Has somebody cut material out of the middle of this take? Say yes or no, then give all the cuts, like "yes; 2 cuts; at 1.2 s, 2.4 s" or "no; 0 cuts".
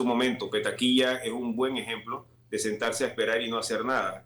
no; 0 cuts